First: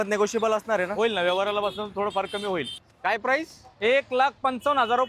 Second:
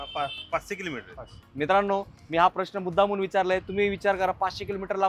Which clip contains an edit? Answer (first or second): first